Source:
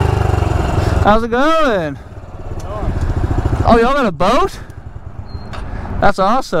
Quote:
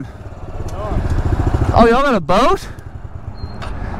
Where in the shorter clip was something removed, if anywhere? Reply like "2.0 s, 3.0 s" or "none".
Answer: none